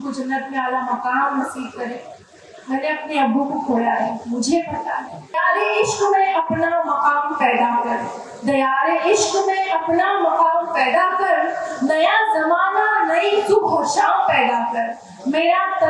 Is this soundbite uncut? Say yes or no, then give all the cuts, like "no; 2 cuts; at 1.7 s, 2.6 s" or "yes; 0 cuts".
no; 1 cut; at 5.3 s